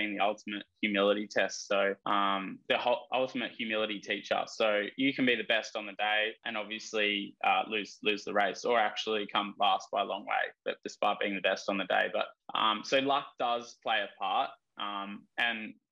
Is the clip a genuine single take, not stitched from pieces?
no; 4 cuts; at 2.0 s, 6.4 s, 10.8 s, 12.4 s

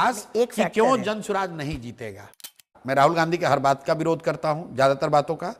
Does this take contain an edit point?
yes; 1 cut; at 2.5 s

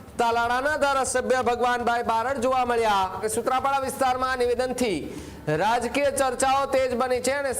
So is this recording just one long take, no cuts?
no; 1 cut; at 3.3 s

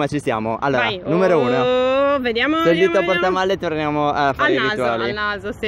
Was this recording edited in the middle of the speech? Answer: no; 0 cuts

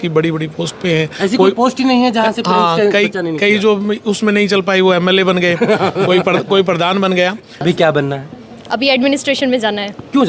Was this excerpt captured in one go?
no; 1 cut; at 7.5 s

